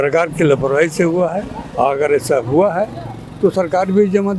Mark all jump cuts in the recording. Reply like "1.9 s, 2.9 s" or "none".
none

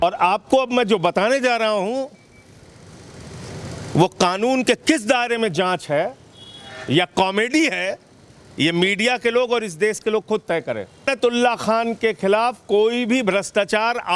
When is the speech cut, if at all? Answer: 11.0 s

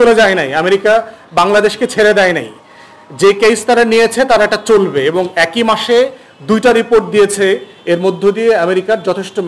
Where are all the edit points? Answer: none

